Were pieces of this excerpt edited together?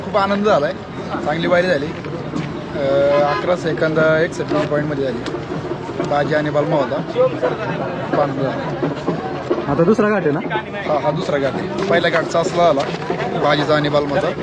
no; 0 cuts

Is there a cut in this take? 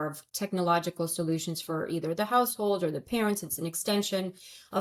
no; 0 cuts

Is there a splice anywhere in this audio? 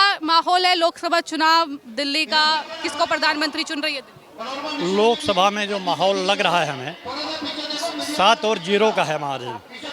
no; 0 cuts

